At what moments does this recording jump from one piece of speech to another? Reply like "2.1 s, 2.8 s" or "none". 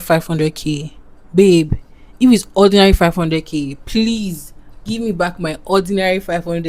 none